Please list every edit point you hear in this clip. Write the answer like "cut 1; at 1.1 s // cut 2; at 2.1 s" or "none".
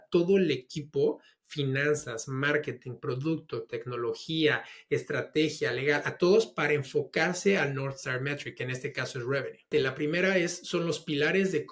cut 1; at 9.7 s